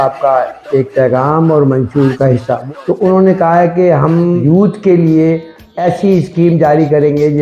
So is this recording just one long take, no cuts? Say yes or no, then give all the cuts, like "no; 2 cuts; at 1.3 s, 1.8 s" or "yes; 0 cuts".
no; 3 cuts; at 2.6 s, 4.4 s, 5.7 s